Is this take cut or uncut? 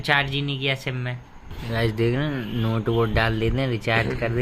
cut